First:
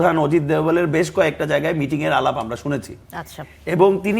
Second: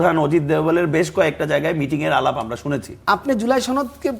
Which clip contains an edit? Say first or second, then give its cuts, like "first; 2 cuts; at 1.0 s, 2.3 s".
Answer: second; 1 cut; at 3.1 s